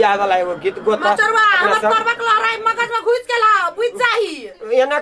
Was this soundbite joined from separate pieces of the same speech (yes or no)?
no